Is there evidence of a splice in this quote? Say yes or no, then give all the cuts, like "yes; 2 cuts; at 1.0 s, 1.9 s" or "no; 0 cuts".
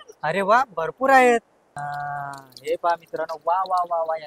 yes; 1 cut; at 1.6 s